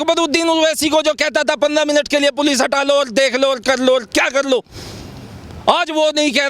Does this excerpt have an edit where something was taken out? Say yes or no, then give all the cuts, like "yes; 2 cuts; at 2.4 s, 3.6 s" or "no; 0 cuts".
no; 0 cuts